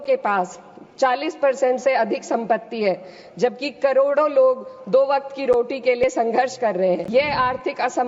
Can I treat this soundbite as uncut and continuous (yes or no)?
no